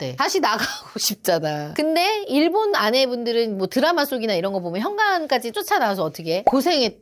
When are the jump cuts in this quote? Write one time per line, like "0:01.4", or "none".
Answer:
0:01.7